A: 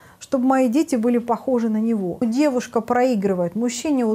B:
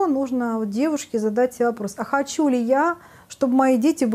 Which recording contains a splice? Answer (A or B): A